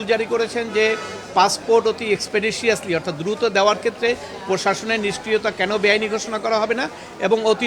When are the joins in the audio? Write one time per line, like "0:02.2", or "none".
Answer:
none